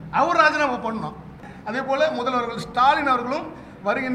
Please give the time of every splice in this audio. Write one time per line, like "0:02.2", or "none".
0:01.4